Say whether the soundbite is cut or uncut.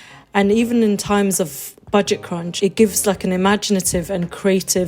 cut